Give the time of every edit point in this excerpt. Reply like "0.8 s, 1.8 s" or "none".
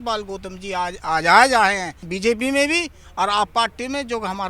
2.1 s